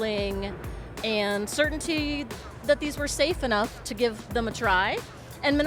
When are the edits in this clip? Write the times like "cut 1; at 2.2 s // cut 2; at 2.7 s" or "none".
none